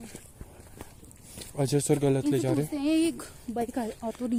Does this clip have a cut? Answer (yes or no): no